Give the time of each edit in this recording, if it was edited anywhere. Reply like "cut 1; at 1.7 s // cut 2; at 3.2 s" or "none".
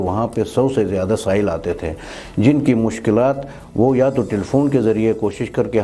none